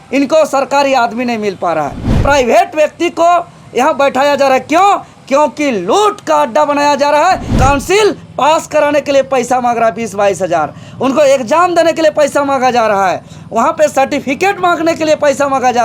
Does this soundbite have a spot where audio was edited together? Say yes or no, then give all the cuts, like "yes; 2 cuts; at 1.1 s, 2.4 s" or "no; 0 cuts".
yes; 2 cuts; at 2.2 s, 7.5 s